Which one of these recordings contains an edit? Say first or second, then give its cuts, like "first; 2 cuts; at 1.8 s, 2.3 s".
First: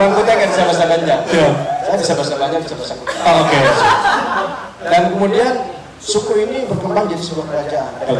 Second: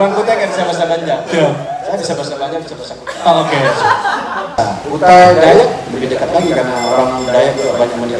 second; 1 cut; at 4.6 s